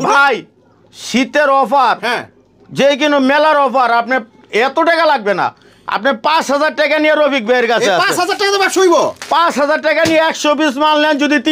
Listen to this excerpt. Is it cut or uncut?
uncut